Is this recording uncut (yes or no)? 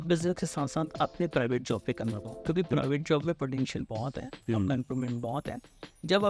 yes